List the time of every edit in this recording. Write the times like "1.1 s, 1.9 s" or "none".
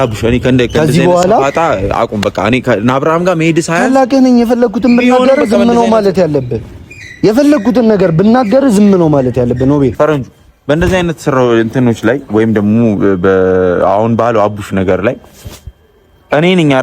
9.9 s